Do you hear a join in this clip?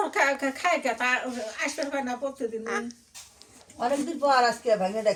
no; 0 cuts

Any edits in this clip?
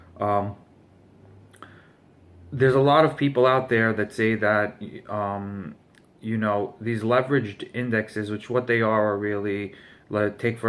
no; 0 cuts

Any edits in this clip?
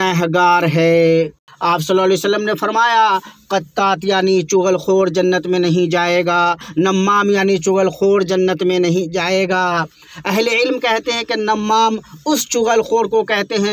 yes; 2 cuts; at 1.5 s, 6.7 s

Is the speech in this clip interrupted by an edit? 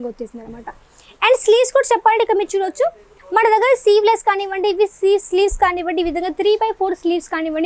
no; 0 cuts

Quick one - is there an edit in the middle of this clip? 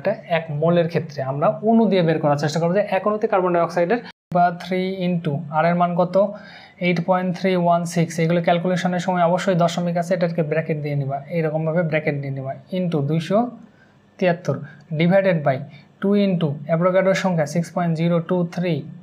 yes; 1 cut; at 4.3 s

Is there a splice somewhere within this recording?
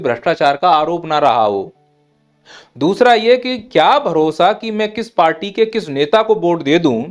no; 0 cuts

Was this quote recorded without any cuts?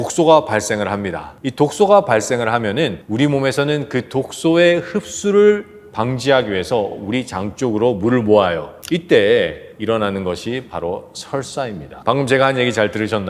yes; 0 cuts

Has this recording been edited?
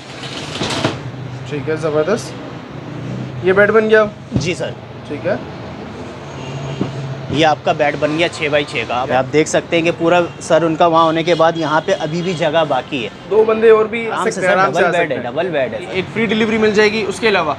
yes; 4 cuts; at 9.0 s, 13.2 s, 14.2 s, 16.0 s

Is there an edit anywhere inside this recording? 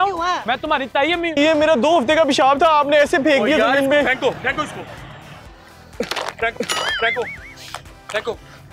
yes; 1 cut; at 1.4 s

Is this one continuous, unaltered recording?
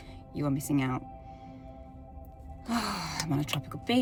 yes; 0 cuts

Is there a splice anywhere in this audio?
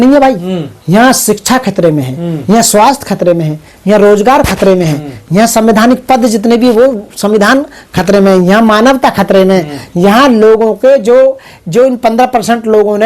no; 0 cuts

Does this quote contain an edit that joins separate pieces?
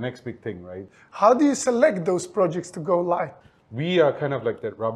yes; 2 cuts; at 0.9 s, 3.3 s

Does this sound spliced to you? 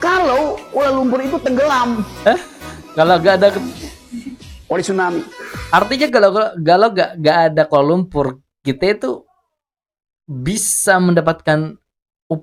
no; 0 cuts

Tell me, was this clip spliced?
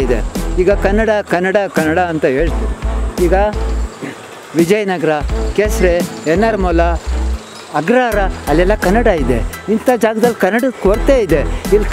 no; 0 cuts

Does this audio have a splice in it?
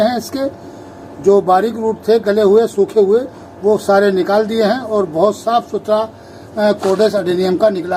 no; 0 cuts

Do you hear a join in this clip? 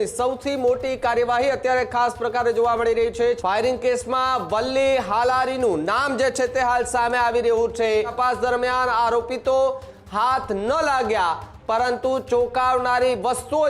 yes; 2 cuts; at 3.4 s, 8.1 s

